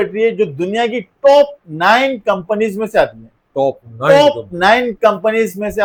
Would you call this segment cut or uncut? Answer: uncut